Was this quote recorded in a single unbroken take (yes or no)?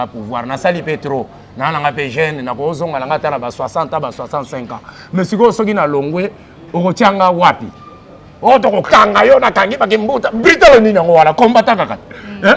yes